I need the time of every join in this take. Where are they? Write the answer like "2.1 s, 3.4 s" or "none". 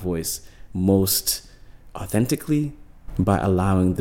none